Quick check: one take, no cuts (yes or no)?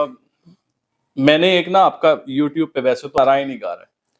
no